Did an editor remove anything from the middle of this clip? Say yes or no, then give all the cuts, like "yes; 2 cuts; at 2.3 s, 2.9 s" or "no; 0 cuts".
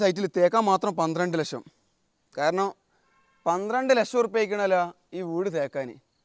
no; 0 cuts